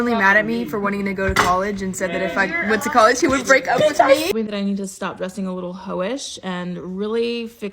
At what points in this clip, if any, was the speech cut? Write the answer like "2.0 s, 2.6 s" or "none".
4.3 s